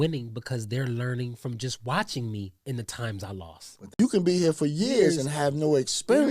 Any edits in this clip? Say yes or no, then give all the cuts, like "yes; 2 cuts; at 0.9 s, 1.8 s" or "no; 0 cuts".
yes; 1 cut; at 4.1 s